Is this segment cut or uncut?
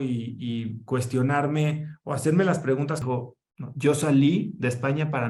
cut